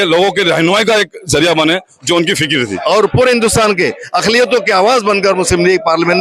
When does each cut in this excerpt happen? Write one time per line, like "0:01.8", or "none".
0:02.7